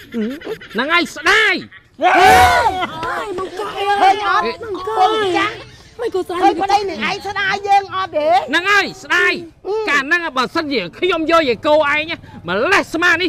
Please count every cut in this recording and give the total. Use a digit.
0